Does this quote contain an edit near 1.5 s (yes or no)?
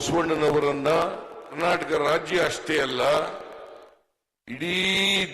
yes